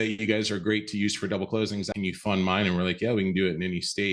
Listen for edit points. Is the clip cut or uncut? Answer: cut